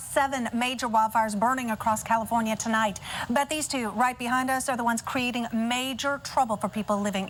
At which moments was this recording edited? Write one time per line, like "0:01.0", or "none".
none